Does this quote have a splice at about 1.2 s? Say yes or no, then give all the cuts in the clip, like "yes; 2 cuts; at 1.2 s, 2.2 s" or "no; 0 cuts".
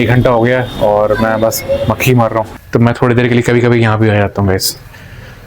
no; 1 cut; at 2.5 s